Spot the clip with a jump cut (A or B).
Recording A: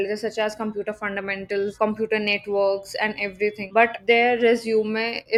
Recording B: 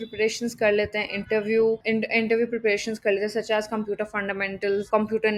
B